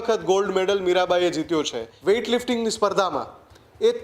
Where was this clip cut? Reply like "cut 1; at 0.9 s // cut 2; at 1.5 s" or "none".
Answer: cut 1; at 1.8 s